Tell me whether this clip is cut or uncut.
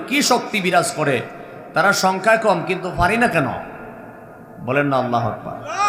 uncut